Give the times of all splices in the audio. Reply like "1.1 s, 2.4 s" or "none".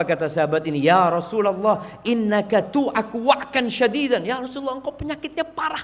none

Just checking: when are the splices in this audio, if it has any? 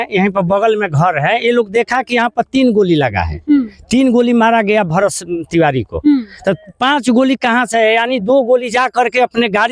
none

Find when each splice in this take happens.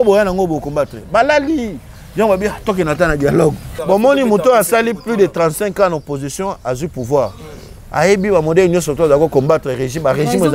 3.7 s

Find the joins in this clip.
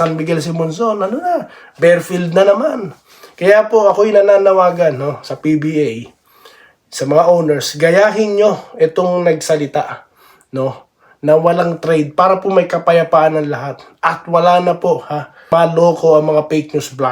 15.5 s

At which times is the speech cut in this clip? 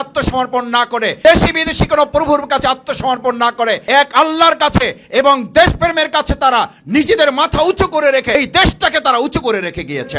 1.2 s, 3.8 s, 8.3 s

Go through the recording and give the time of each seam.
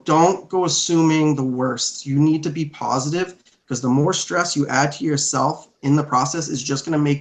none

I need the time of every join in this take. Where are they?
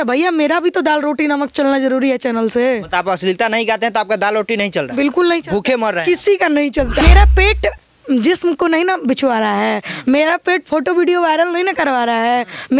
7.0 s

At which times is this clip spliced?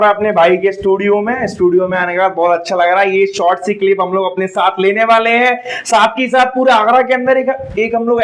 none

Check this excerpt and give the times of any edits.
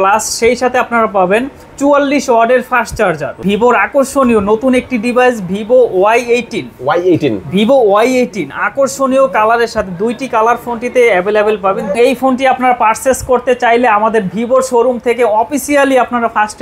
3.3 s, 12.0 s

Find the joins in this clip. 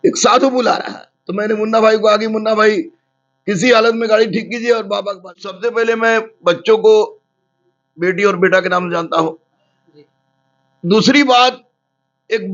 5.6 s

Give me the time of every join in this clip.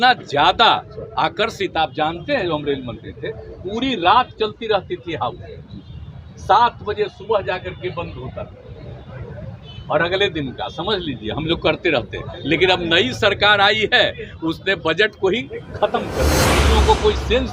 16.6 s

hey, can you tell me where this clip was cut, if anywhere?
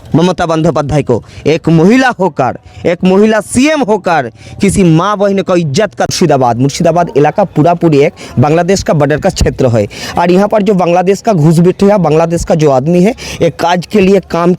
6.1 s

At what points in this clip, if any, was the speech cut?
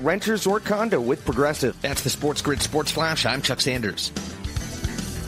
none

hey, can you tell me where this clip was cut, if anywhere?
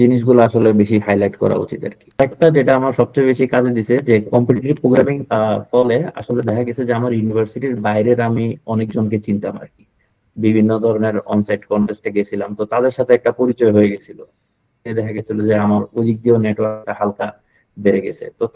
2.2 s, 5.2 s

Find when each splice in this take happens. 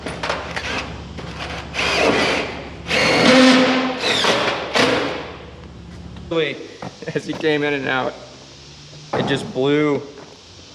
6.3 s

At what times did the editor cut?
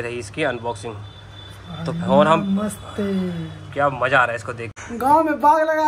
4.7 s

